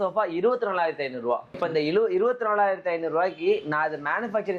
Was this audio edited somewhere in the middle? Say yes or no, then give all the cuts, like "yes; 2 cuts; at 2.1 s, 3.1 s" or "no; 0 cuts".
yes; 1 cut; at 1.4 s